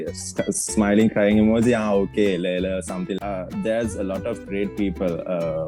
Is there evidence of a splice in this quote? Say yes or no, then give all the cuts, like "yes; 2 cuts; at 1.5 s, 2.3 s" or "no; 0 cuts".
yes; 1 cut; at 3.2 s